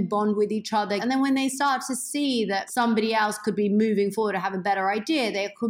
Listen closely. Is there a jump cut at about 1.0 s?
yes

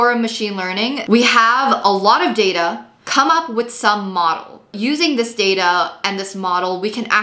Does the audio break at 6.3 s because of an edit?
no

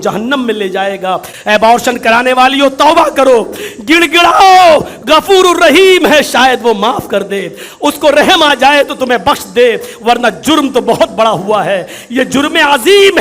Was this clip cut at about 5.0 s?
no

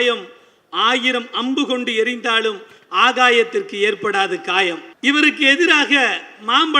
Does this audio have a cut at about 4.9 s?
yes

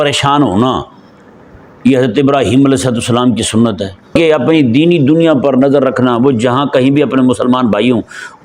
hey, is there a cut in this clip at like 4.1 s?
yes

